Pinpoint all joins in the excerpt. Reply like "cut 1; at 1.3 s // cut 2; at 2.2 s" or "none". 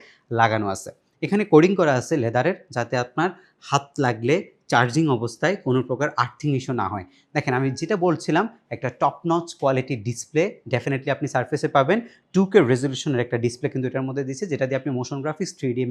none